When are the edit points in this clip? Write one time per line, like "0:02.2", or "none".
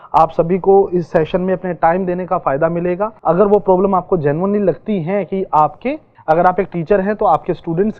0:03.1
0:06.1